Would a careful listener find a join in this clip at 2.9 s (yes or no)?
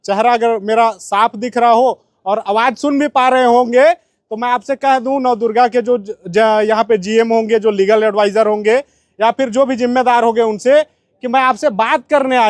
no